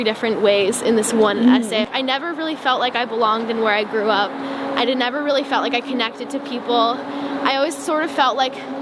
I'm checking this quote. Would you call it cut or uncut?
cut